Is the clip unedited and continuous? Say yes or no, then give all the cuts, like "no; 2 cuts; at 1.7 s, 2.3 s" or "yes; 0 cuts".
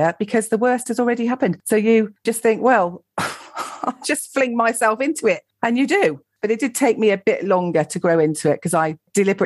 no; 1 cut; at 6.4 s